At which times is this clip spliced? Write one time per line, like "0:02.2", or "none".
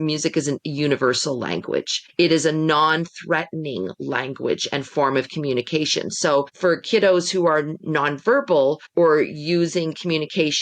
0:02.0
0:06.5
0:08.8